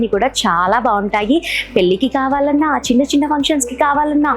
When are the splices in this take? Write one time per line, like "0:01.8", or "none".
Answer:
none